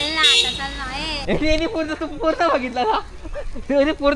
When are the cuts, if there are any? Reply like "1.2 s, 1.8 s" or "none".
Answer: none